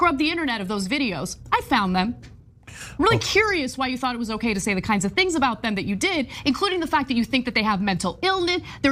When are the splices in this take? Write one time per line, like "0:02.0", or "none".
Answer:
none